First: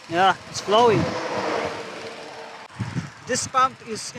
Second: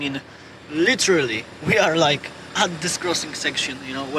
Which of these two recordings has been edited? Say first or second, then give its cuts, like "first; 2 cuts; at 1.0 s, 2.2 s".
first; 1 cut; at 2.8 s